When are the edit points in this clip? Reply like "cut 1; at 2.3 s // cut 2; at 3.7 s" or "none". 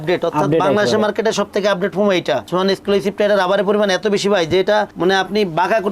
cut 1; at 2.5 s